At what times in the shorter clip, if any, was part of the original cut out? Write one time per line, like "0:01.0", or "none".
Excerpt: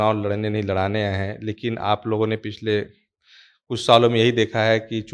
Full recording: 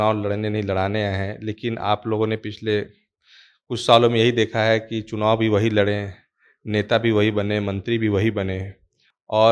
none